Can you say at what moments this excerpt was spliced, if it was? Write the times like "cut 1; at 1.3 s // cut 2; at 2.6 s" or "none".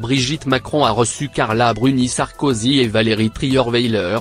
none